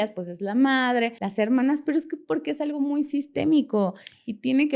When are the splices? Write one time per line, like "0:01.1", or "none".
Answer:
0:01.2

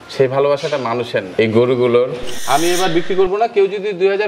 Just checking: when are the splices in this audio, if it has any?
0:01.3
0:02.3

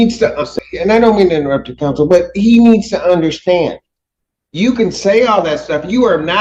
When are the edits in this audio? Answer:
none

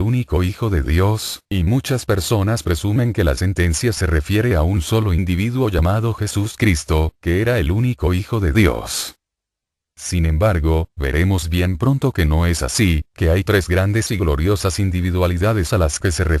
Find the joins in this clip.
0:06.1

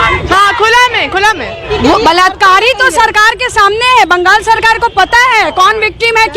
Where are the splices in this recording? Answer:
0:01.6

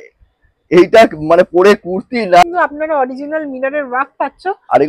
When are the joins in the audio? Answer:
0:02.4

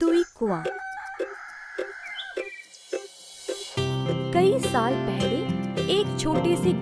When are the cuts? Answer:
0:01.5

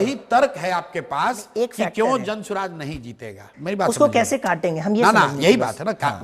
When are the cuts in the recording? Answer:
none

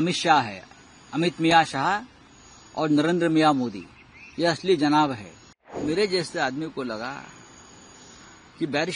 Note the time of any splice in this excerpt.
0:05.7

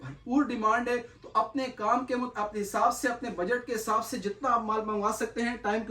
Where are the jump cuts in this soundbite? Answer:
none

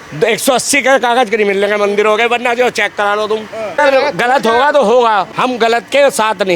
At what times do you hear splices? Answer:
0:03.8
0:05.3

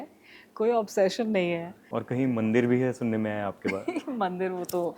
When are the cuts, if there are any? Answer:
0:01.9

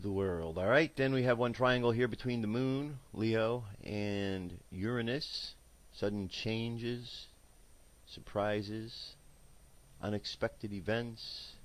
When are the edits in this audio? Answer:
none

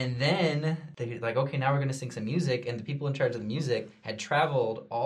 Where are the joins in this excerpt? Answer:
0:00.9

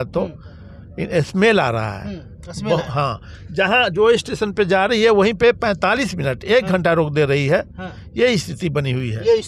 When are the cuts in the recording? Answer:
none

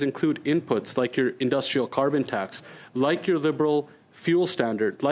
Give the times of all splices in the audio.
none

